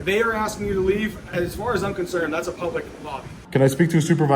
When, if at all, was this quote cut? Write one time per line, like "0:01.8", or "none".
0:01.3
0:03.3